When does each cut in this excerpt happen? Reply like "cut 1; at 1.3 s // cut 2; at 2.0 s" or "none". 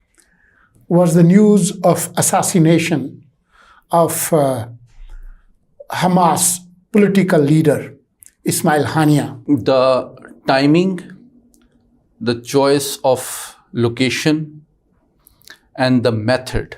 cut 1; at 9.4 s